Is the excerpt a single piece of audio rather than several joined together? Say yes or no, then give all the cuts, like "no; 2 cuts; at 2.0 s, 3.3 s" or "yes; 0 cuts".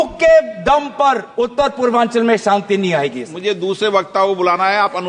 no; 2 cuts; at 1.3 s, 3.3 s